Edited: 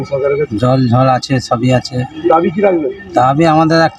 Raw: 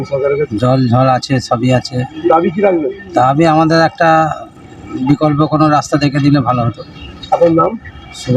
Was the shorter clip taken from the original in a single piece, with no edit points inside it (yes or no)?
yes